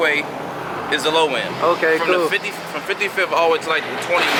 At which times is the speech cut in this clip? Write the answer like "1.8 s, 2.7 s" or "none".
none